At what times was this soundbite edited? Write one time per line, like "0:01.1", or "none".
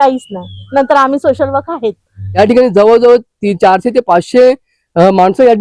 0:02.2